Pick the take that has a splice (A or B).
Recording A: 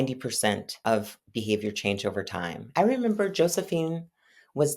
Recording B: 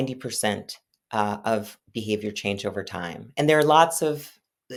A